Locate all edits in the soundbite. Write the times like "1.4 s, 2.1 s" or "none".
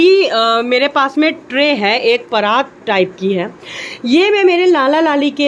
none